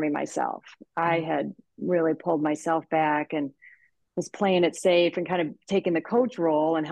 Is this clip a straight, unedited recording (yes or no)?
yes